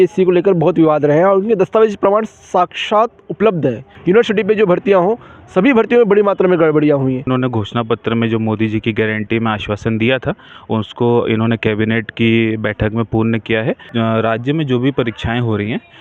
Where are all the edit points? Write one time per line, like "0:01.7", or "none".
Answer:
0:03.9
0:07.3
0:13.8